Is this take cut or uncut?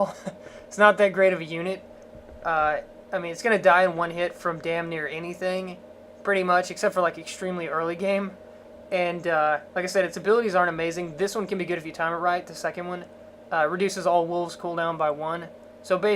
cut